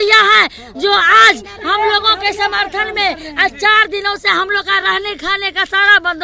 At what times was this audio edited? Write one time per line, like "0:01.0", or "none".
none